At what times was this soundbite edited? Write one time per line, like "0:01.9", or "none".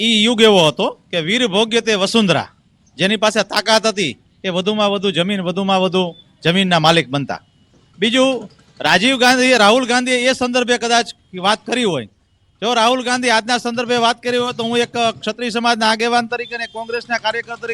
0:16.7